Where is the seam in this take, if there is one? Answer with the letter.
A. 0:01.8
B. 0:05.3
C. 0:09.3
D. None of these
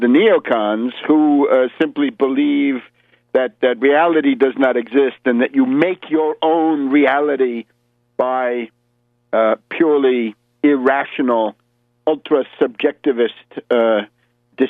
D